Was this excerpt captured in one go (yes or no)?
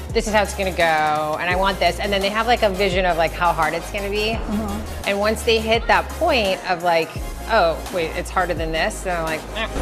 yes